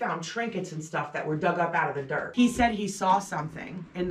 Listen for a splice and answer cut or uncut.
cut